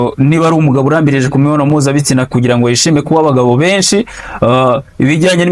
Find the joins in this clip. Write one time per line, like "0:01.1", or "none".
none